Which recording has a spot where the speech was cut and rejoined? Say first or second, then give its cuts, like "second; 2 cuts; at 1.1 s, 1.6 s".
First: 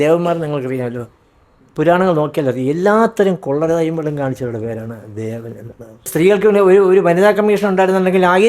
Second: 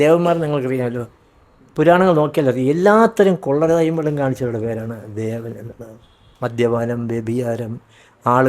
first; 1 cut; at 6.1 s